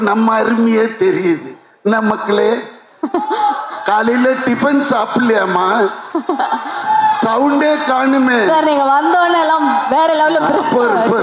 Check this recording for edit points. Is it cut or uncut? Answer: uncut